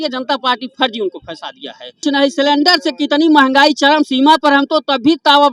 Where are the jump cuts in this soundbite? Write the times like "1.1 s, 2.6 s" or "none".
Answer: 2.0 s